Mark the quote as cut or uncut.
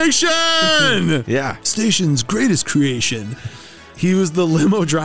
cut